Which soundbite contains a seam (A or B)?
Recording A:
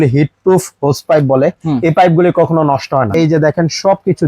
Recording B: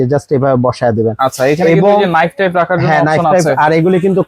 A